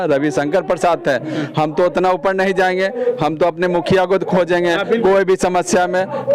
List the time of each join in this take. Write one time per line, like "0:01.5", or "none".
none